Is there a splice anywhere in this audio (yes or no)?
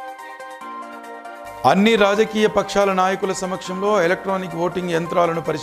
yes